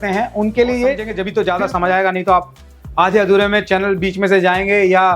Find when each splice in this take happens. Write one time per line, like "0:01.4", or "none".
0:01.1